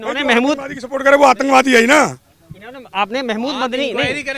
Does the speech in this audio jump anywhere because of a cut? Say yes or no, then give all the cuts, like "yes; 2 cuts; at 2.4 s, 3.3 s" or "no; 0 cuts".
no; 0 cuts